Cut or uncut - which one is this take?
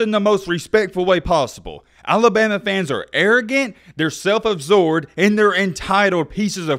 uncut